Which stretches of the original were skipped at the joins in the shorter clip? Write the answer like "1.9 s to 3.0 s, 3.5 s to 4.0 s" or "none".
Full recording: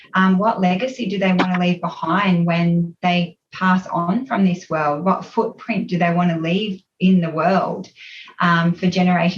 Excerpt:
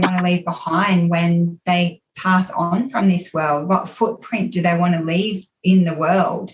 none